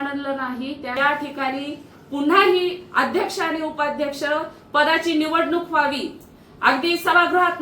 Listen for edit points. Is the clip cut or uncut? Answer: cut